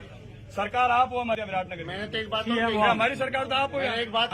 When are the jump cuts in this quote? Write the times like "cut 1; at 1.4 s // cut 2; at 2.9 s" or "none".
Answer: cut 1; at 1.3 s